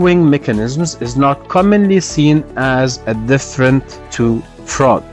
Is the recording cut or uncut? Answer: cut